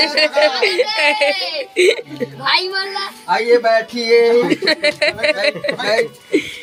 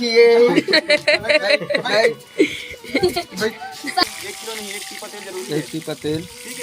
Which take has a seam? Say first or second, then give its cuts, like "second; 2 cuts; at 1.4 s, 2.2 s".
second; 1 cut; at 4.0 s